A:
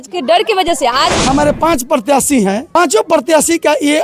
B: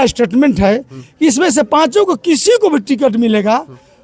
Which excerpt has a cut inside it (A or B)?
A